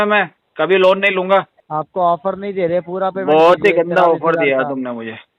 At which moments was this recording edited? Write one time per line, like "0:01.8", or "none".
0:01.6